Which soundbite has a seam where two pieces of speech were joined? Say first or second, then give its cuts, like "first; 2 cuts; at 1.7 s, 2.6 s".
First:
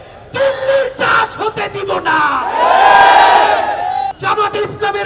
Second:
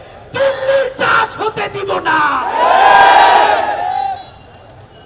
first; 1 cut; at 4.2 s